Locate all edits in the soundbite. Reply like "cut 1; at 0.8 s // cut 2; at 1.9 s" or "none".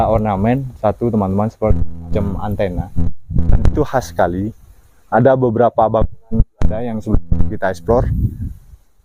none